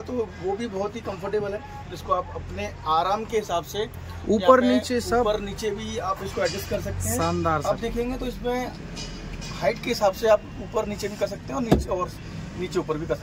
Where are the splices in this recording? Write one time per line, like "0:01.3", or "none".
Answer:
none